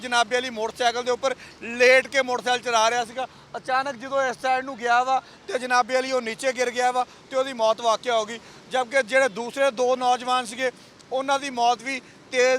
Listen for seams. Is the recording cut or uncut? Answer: uncut